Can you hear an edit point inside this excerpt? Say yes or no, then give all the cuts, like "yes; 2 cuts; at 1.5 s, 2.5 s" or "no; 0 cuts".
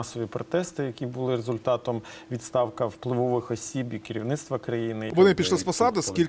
yes; 1 cut; at 5.1 s